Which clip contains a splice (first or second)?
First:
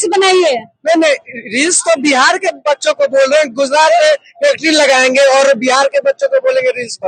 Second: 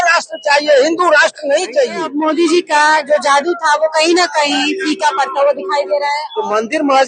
second